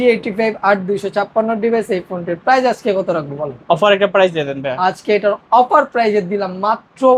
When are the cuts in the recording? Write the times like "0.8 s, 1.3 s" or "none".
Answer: none

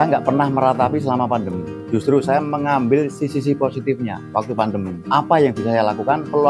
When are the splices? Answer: none

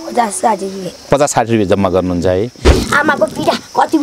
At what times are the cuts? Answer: 2.7 s

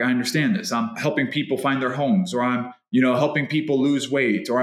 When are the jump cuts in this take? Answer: 1.0 s

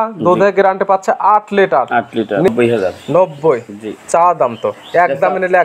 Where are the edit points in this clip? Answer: 2.5 s

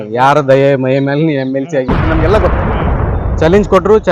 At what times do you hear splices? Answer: 3.1 s

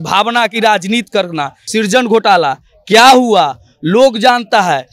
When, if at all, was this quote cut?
1.6 s

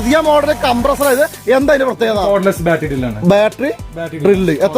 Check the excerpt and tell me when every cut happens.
2.2 s

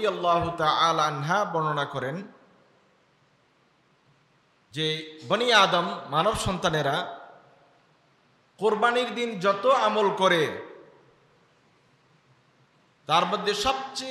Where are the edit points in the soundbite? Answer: 4.7 s

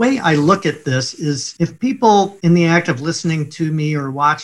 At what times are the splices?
none

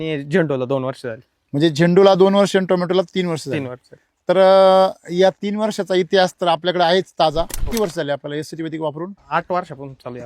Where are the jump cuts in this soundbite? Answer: 7.6 s, 9.2 s

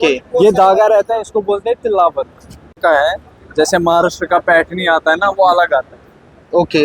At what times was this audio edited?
2.7 s

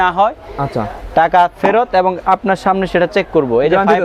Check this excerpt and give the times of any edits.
none

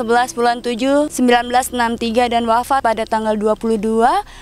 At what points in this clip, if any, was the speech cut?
1.1 s, 2.8 s

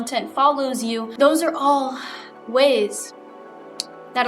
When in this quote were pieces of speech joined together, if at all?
1.1 s

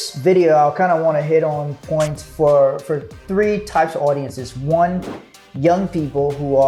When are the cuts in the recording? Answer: none

